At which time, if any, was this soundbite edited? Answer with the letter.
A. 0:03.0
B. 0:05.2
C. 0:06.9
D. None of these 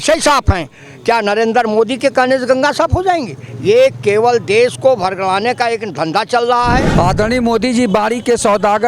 C